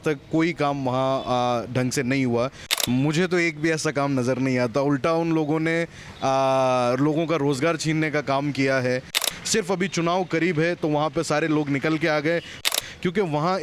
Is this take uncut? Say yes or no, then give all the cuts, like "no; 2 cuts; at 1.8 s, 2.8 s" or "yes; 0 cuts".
no; 3 cuts; at 2.7 s, 9.2 s, 12.7 s